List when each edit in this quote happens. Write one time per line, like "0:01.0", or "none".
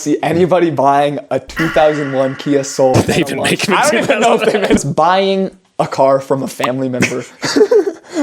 0:02.9
0:04.8